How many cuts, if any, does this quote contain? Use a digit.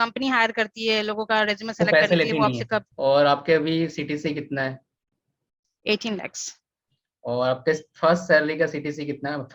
1